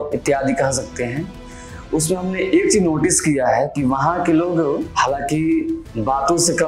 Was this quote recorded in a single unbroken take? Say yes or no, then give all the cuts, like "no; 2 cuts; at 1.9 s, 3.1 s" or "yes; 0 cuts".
no; 1 cut; at 4.9 s